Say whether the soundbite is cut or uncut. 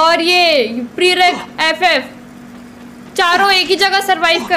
uncut